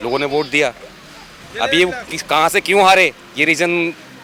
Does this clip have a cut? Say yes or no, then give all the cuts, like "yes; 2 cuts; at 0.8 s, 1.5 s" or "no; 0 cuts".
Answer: no; 0 cuts